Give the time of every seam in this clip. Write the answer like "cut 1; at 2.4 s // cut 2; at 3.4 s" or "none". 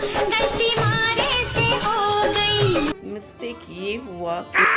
none